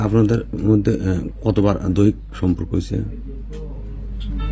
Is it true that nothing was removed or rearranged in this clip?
yes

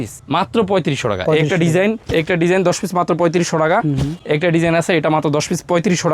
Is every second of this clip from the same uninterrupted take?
yes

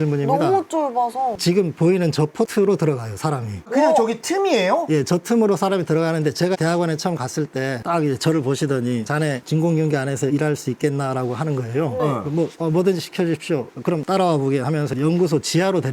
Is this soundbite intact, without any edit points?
yes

